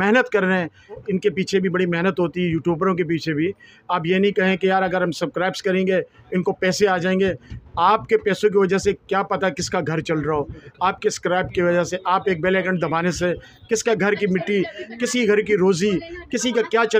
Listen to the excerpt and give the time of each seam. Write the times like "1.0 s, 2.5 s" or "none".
1.0 s